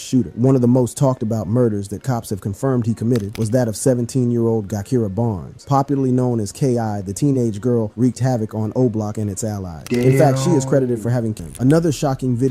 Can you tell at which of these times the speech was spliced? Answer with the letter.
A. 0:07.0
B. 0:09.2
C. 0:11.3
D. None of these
C